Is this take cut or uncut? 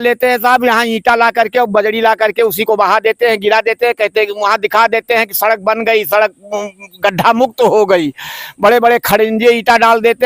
uncut